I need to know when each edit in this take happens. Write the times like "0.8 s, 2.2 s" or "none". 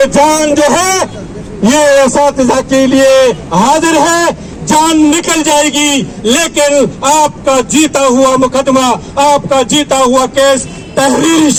none

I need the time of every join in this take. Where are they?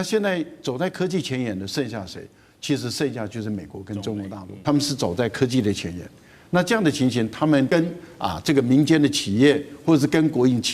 4.5 s, 7.7 s

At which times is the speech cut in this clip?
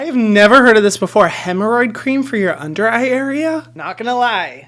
3.7 s

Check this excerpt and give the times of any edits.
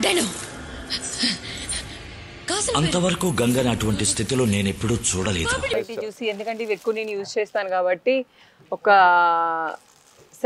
5.8 s

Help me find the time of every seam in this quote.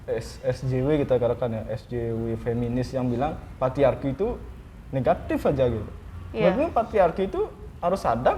none

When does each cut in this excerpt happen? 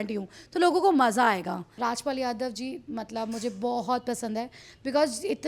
1.7 s

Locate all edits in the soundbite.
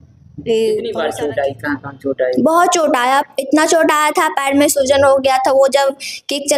1.0 s

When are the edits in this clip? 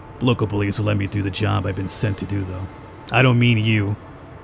2.9 s

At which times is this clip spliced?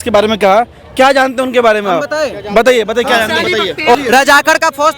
3.9 s

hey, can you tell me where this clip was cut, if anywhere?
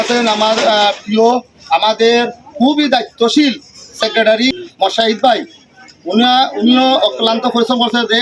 4.5 s

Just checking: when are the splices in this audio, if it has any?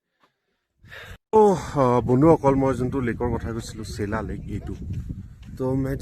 1.1 s

